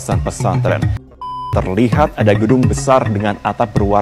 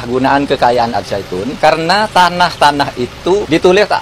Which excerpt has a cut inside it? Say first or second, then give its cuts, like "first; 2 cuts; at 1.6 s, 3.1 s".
first; 1 cut; at 1.0 s